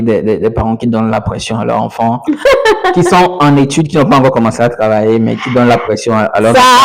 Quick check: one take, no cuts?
yes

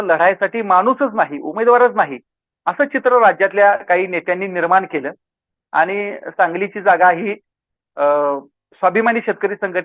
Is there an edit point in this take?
no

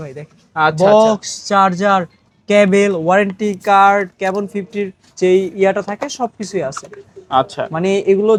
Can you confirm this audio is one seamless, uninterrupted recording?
yes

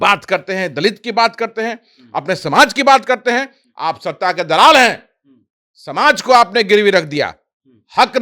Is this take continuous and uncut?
yes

